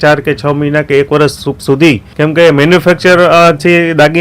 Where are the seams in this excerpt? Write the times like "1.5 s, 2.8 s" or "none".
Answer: 2.1 s